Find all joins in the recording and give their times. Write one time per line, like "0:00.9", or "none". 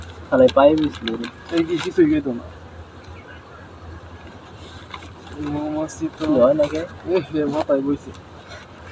none